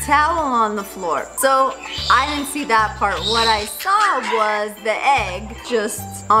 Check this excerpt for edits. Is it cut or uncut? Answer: uncut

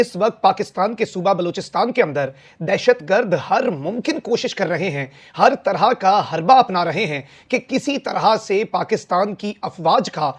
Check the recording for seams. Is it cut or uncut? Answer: uncut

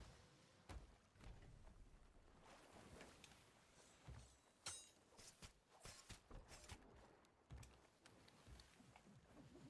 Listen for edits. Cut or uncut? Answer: uncut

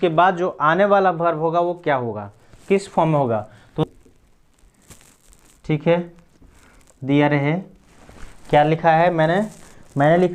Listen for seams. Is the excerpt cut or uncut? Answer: cut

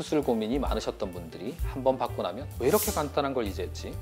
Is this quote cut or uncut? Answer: uncut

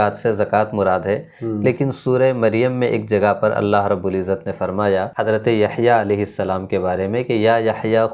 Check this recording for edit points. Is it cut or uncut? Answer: cut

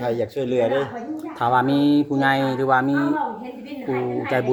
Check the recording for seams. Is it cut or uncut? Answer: uncut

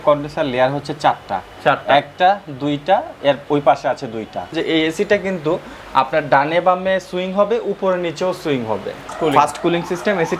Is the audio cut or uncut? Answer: cut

